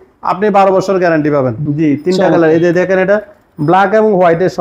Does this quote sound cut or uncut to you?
cut